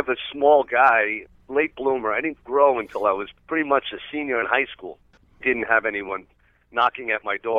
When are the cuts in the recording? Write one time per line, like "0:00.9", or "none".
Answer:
0:01.2
0:03.3
0:05.4